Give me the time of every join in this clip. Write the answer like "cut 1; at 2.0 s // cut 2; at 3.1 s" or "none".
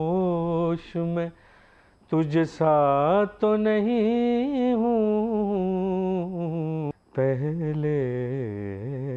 cut 1; at 7.0 s